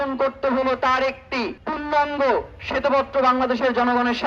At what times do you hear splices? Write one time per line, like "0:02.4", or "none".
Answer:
0:01.6